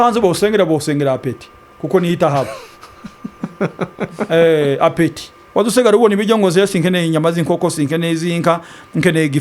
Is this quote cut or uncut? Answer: cut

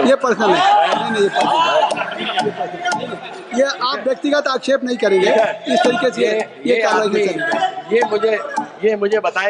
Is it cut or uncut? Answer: uncut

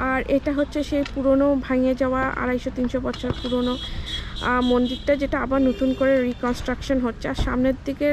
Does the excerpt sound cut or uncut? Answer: uncut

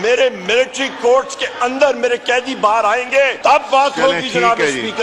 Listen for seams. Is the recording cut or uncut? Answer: cut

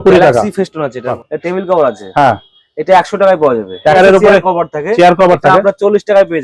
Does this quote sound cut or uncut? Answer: cut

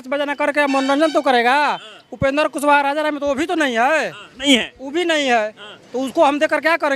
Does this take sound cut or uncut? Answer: uncut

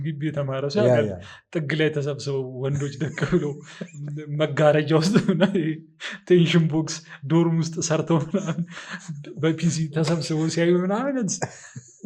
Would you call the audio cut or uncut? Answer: uncut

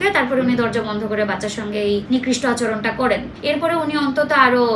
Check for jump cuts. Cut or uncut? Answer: cut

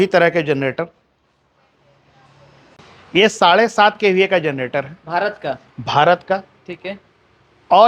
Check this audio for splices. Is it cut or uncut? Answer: cut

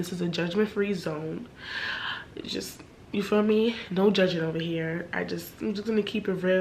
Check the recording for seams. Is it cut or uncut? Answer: uncut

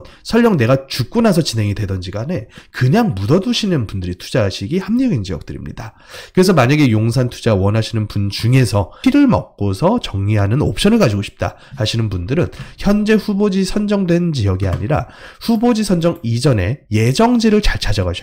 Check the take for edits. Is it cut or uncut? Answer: cut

